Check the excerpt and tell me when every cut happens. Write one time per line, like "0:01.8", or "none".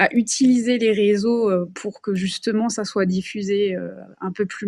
none